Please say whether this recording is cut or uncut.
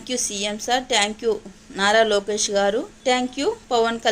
cut